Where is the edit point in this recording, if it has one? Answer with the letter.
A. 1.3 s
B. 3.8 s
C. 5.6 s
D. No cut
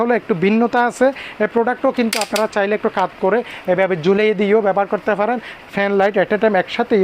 C